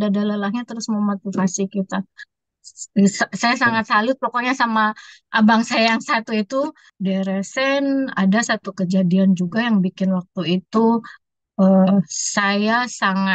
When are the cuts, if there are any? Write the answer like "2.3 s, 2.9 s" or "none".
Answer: 6.8 s